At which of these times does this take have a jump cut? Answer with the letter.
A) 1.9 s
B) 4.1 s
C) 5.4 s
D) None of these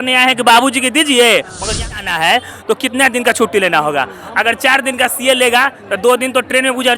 A